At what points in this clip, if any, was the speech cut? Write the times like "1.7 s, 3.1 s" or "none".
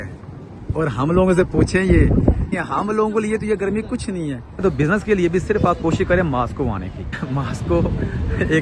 2.6 s, 4.6 s, 7.2 s